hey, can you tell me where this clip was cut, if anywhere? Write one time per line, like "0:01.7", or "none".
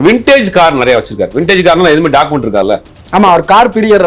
0:02.9